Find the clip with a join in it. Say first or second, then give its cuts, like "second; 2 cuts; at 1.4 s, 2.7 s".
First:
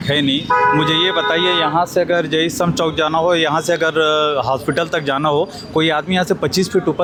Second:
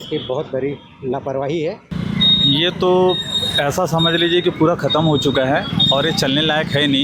second; 1 cut; at 1.9 s